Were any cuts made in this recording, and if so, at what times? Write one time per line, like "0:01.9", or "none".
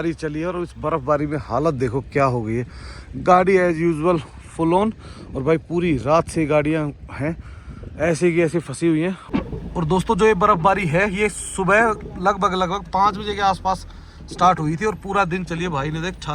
0:09.2